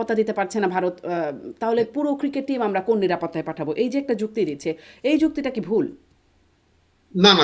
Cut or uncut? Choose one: uncut